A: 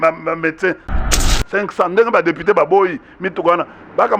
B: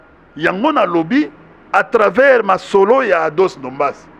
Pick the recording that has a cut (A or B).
A